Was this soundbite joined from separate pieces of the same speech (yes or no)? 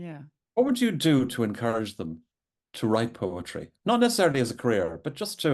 no